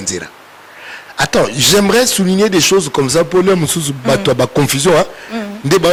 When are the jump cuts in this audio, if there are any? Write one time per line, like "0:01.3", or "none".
none